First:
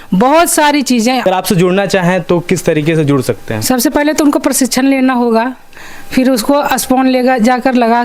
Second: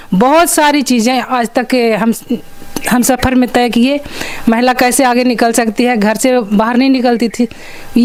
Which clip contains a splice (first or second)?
first